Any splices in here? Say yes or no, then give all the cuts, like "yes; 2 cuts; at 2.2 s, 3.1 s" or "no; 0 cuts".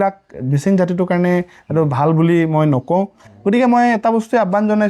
no; 0 cuts